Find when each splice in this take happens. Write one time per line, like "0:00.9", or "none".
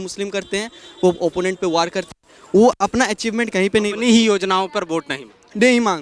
none